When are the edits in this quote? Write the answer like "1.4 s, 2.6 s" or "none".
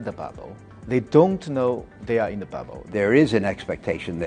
2.9 s